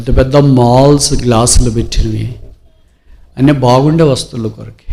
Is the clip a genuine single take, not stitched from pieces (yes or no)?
yes